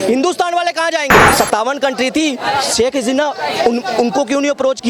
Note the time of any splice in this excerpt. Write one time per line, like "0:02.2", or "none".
0:01.3